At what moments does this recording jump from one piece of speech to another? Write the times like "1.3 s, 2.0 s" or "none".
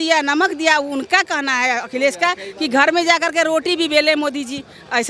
none

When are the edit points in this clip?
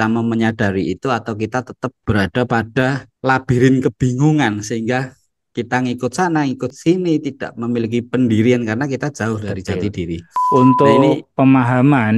10.3 s

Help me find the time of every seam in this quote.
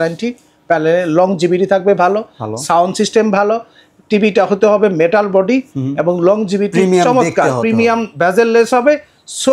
none

